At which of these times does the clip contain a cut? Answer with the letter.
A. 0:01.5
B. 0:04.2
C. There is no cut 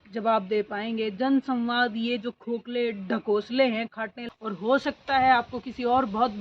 B